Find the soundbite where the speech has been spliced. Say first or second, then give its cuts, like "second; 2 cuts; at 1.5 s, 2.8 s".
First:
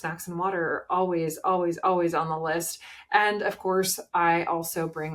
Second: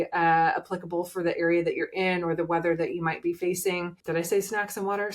second; 1 cut; at 3.9 s